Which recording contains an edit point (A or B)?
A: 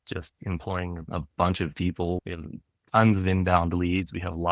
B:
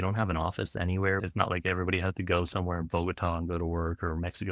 A